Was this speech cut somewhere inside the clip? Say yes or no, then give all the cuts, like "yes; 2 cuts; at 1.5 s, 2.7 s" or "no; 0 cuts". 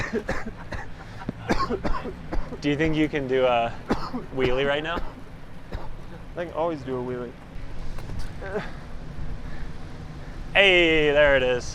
yes; 1 cut; at 7.5 s